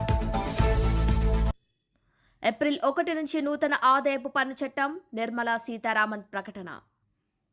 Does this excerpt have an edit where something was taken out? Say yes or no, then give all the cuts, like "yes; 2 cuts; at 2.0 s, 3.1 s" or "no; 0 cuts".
yes; 1 cut; at 1.4 s